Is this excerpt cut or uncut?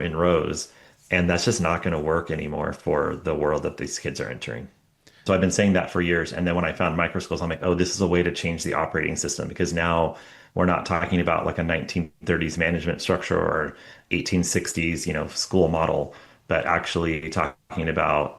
cut